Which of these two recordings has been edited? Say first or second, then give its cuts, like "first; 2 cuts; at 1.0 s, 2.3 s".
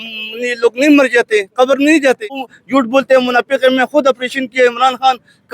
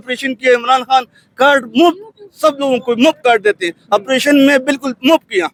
first; 1 cut; at 2.5 s